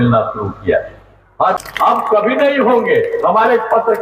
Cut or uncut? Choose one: cut